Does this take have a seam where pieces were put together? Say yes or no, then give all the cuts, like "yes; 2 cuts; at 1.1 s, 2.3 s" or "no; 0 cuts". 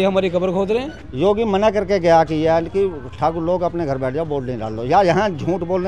yes; 1 cut; at 1.0 s